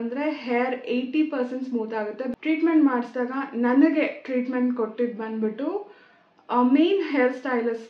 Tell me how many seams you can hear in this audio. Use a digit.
1